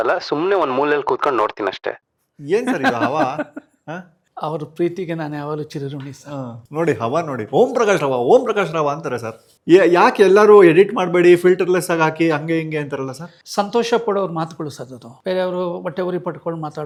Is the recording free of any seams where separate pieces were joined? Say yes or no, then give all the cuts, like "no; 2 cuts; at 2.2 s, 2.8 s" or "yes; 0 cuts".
yes; 0 cuts